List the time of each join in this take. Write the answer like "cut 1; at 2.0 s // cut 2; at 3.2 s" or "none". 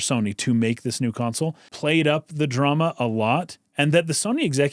cut 1; at 1.7 s